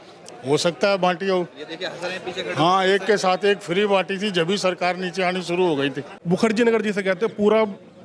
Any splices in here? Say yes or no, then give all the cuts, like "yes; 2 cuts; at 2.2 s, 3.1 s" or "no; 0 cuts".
yes; 1 cut; at 6.1 s